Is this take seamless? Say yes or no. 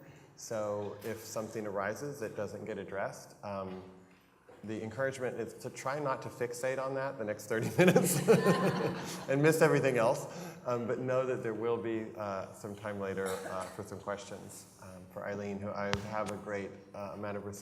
no